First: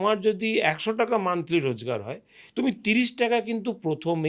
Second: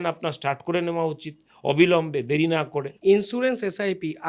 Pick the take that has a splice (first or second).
second